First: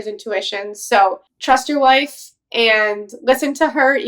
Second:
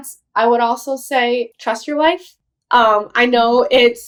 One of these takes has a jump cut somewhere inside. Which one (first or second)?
first